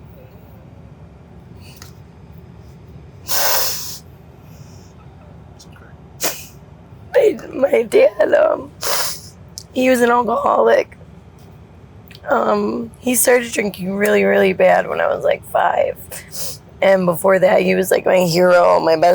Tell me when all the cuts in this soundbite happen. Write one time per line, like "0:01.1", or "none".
none